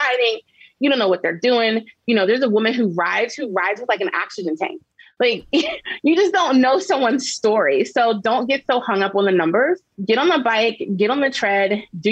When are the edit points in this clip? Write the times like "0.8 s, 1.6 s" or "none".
9.9 s